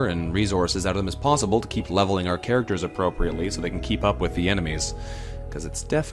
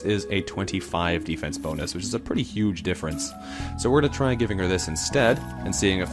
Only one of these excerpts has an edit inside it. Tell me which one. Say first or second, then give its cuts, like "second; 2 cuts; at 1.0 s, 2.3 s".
first; 1 cut; at 2.1 s